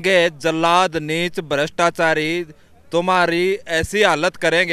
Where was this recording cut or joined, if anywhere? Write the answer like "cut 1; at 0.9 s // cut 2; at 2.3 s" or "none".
none